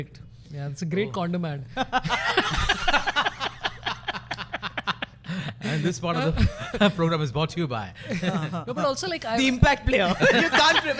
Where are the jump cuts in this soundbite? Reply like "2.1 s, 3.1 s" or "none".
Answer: none